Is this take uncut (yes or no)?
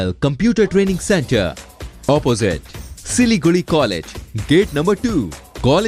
yes